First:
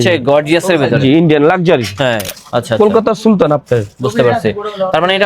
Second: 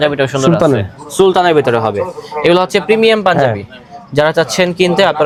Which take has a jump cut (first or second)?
first